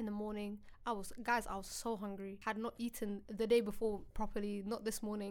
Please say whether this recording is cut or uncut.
cut